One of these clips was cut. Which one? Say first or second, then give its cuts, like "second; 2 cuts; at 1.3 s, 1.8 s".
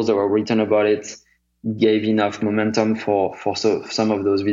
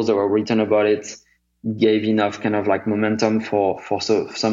first; 1 cut; at 2.4 s